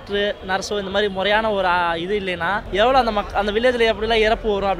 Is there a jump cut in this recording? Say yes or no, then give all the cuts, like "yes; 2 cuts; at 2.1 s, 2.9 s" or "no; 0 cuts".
yes; 1 cut; at 2.6 s